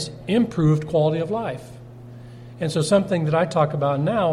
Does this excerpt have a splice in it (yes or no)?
no